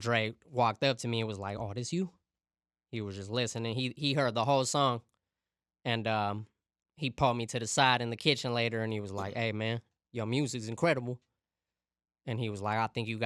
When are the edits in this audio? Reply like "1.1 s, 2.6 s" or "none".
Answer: none

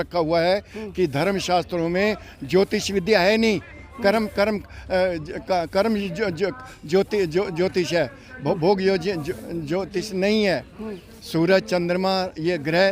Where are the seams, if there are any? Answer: none

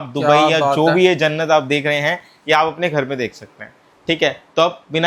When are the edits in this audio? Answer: none

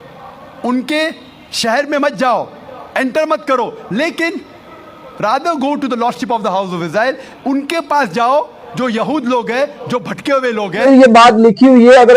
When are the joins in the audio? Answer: 10.9 s

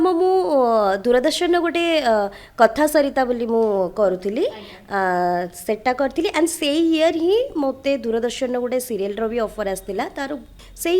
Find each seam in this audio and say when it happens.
none

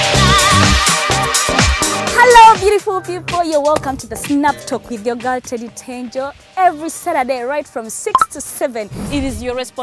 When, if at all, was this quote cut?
1.7 s

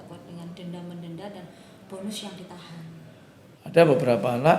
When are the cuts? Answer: 3.4 s

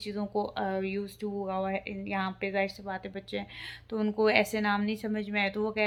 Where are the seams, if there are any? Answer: none

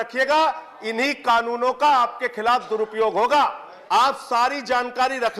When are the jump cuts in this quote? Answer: 3.7 s

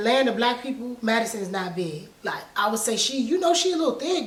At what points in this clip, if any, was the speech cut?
none

